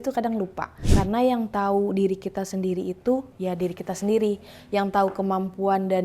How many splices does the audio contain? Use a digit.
1